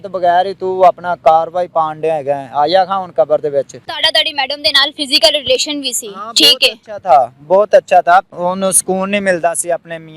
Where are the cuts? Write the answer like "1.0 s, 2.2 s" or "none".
3.9 s, 8.3 s

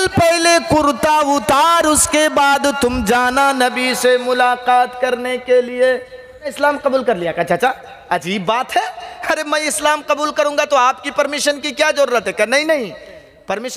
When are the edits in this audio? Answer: 6.5 s

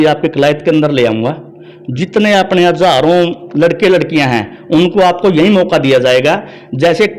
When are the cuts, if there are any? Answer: none

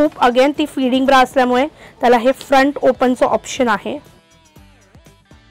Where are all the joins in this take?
none

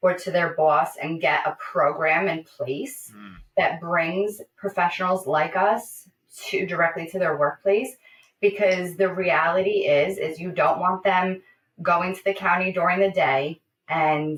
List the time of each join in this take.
none

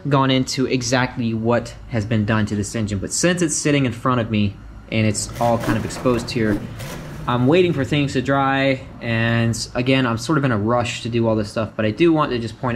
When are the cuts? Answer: none

